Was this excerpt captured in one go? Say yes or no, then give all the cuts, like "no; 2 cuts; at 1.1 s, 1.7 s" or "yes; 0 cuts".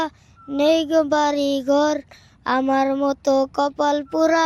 yes; 0 cuts